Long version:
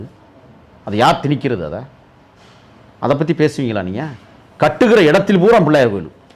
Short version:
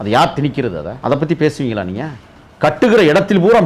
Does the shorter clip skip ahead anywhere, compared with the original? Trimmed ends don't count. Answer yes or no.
yes